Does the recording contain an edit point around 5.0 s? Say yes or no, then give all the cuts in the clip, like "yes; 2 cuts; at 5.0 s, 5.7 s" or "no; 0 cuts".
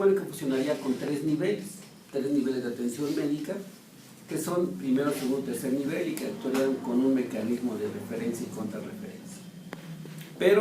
yes; 1 cut; at 5.0 s